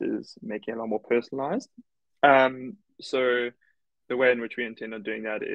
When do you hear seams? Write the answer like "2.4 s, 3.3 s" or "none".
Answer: none